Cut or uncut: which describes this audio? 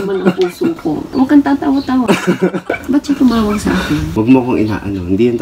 cut